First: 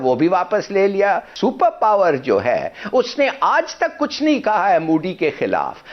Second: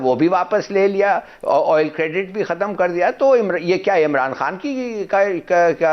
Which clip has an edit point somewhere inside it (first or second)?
first